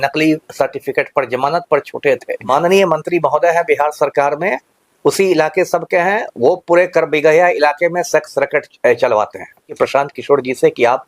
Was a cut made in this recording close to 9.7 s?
yes; 2 cuts; at 2.4 s, 9.7 s

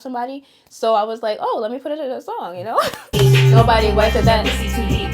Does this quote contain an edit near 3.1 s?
yes; 1 cut; at 3.1 s

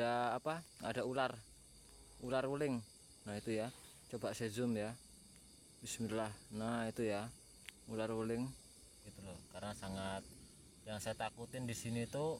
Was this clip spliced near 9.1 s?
yes; 1 cut; at 9.1 s

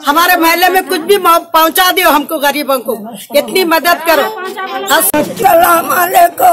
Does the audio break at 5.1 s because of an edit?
yes; 1 cut; at 5.1 s

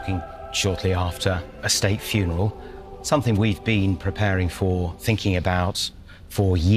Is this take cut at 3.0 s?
no; 0 cuts

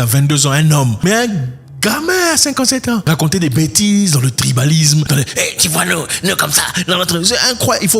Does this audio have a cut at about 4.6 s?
no; 2 cuts; at 1.0 s, 3.0 s

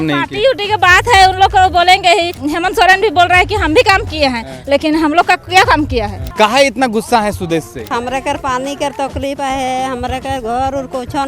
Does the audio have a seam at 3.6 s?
no; 3 cuts; at 2.4 s, 6.2 s, 7.9 s

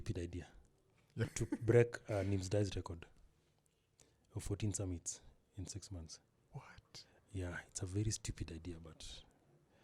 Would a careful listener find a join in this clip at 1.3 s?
yes; 1 cut; at 1.3 s

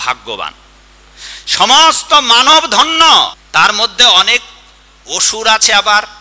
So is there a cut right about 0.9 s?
no; 1 cut; at 3.4 s

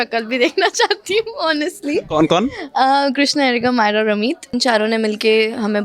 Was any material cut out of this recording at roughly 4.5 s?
yes; 1 cut; at 4.5 s

